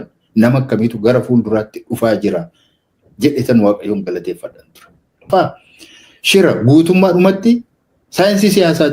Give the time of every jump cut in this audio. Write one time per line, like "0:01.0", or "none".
0:05.3